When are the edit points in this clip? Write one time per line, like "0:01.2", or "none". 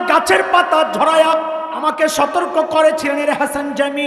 0:01.7